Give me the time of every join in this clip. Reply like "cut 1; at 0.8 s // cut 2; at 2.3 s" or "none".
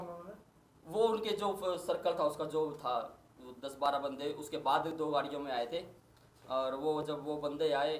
none